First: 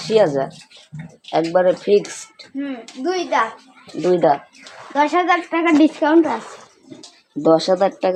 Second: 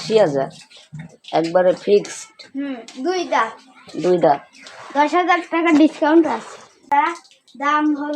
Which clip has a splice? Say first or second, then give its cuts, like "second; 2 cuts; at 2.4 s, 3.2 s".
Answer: second; 1 cut; at 6.8 s